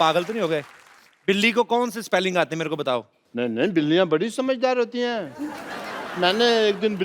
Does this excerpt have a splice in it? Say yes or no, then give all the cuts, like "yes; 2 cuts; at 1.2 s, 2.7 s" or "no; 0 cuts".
yes; 1 cut; at 3.2 s